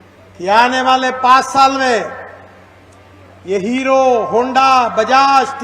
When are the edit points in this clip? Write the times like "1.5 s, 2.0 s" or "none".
none

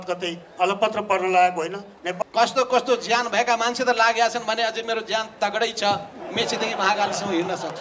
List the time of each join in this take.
2.2 s

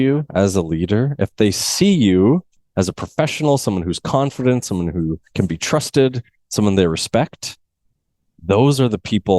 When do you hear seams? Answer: 2.6 s

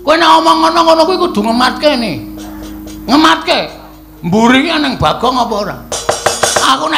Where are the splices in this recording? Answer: 6.0 s

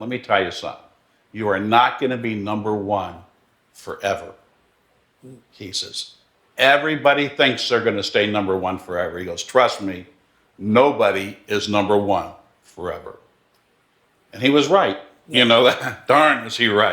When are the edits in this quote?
none

